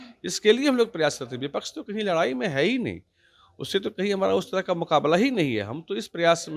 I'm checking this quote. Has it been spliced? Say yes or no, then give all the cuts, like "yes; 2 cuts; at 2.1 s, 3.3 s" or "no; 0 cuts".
no; 0 cuts